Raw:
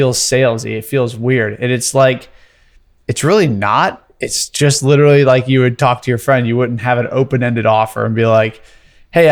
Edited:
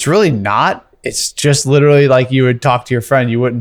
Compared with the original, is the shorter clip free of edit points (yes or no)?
yes